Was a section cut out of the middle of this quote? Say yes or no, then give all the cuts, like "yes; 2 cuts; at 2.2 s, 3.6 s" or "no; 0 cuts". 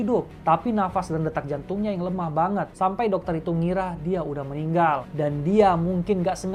no; 0 cuts